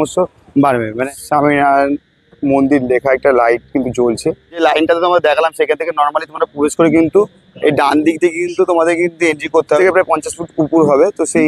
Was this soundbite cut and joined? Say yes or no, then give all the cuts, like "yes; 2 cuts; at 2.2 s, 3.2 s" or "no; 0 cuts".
yes; 3 cuts; at 1.0 s, 4.6 s, 9.8 s